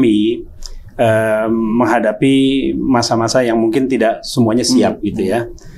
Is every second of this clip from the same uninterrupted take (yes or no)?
yes